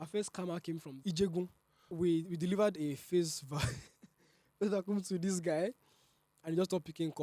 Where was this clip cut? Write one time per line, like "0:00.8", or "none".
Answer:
0:01.0
0:01.9

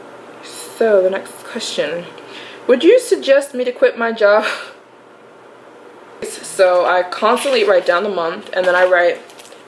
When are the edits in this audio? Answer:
0:06.4

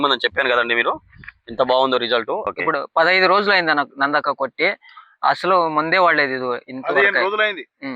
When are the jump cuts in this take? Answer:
0:02.5

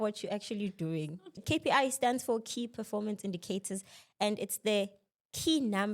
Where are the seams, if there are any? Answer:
0:01.4

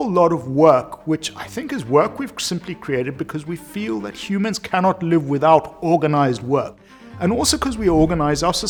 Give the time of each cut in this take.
none

